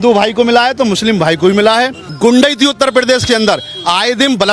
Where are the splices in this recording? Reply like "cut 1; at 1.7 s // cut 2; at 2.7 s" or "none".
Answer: cut 1; at 2.0 s